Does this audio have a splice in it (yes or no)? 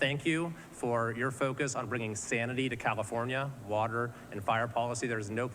no